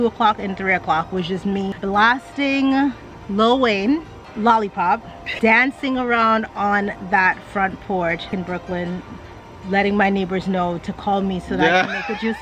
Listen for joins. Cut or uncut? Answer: cut